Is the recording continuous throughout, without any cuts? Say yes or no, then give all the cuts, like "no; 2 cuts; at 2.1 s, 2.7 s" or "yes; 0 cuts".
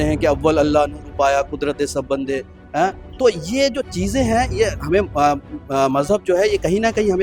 yes; 0 cuts